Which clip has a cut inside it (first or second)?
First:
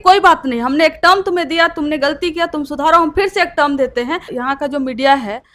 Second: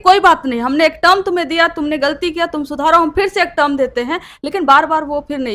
first